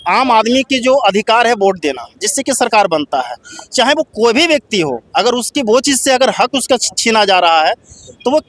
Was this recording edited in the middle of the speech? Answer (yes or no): no